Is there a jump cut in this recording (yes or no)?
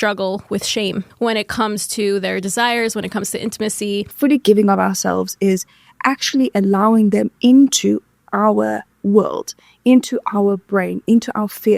yes